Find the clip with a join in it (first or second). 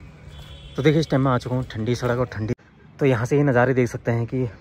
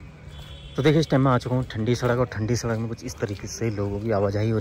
first